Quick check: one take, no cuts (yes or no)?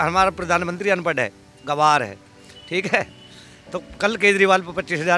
yes